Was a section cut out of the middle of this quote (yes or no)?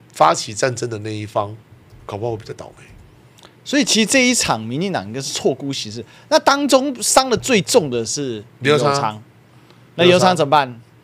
no